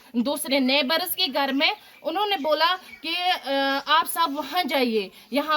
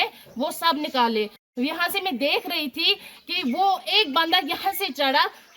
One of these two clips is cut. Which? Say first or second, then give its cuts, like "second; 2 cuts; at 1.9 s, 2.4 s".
second; 1 cut; at 1.4 s